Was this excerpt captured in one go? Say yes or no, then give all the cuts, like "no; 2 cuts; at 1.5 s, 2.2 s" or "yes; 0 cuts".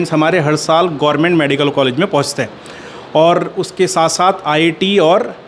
yes; 0 cuts